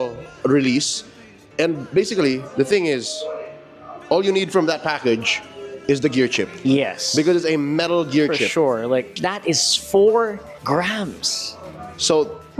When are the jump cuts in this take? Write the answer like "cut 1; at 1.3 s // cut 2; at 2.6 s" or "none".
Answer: cut 1; at 9.2 s // cut 2; at 10.5 s